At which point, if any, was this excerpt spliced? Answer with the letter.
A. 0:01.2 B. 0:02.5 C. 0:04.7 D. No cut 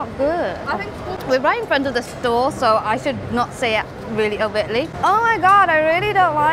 A